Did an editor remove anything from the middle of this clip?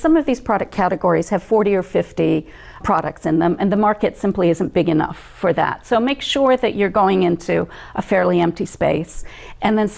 no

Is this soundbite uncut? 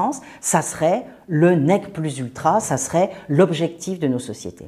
yes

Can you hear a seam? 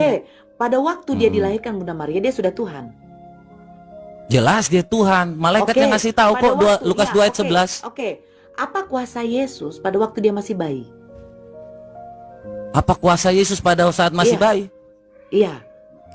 no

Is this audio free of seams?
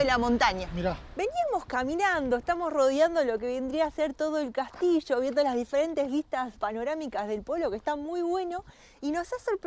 no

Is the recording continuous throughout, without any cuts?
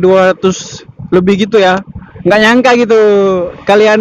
yes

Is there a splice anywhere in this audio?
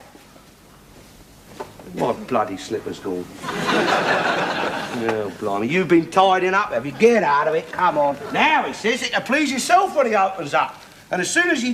no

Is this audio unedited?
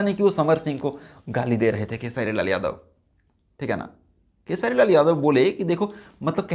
yes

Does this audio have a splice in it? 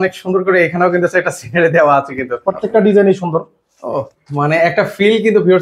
yes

